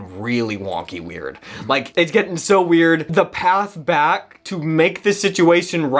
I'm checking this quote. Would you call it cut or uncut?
cut